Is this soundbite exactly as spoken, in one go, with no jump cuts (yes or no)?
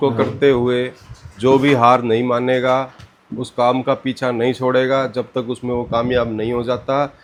yes